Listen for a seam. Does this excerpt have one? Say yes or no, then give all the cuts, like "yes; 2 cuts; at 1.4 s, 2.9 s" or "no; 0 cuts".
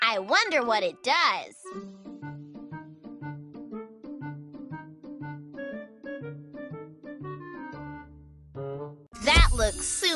yes; 3 cuts; at 1.5 s, 5.0 s, 7.9 s